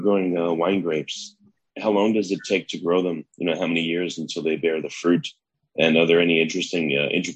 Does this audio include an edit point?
no; 0 cuts

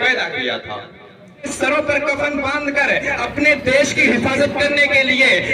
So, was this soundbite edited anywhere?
yes; 1 cut; at 1.5 s

